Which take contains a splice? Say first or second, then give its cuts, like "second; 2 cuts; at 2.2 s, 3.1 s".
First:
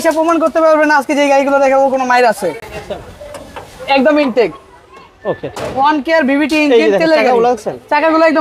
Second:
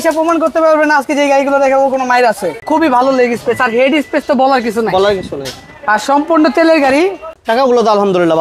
second; 2 cuts; at 2.6 s, 7.3 s